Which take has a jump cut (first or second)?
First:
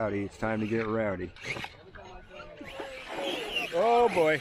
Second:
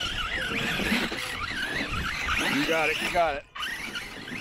first